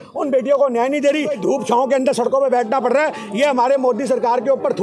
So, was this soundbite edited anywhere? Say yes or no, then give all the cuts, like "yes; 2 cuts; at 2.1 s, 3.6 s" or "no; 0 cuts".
yes; 1 cut; at 1.3 s